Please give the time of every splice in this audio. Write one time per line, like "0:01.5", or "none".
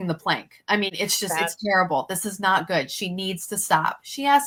none